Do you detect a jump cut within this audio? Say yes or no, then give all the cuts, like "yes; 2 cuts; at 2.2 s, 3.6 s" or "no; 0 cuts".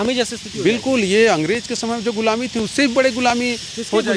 no; 0 cuts